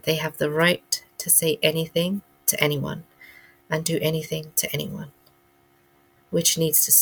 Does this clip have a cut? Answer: no; 0 cuts

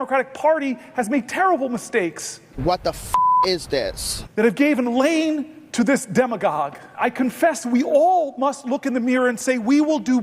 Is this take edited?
yes; 1 cut; at 7.0 s

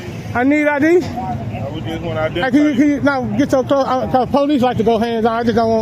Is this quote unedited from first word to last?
yes; 0 cuts

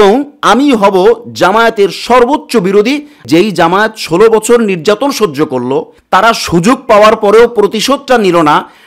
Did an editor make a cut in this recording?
yes; 1 cut; at 3.2 s

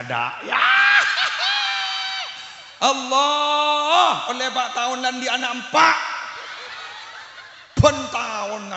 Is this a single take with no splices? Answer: yes; 0 cuts

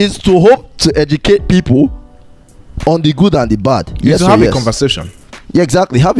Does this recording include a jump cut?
no; 0 cuts

